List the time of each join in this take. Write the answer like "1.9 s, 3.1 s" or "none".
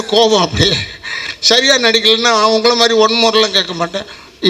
none